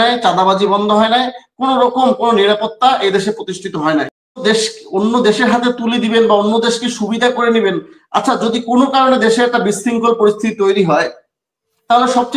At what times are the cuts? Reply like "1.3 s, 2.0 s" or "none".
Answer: 4.4 s